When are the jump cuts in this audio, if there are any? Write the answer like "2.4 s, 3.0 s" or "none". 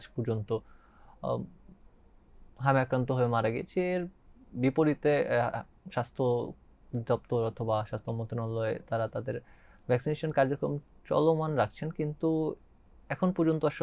none